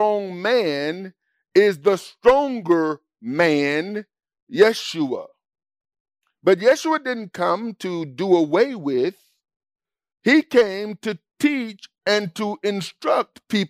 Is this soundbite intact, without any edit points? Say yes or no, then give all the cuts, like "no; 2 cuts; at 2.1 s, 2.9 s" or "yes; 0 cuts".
yes; 0 cuts